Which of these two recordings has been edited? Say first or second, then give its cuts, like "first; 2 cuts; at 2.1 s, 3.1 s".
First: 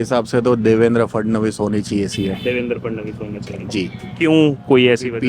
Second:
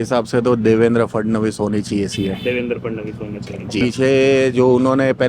second; 1 cut; at 3.8 s